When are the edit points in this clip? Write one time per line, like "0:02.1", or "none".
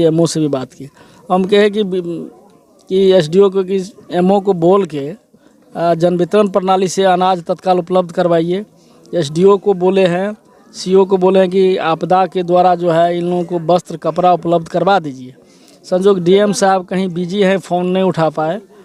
none